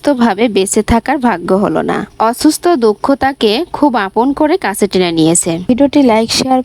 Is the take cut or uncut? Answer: cut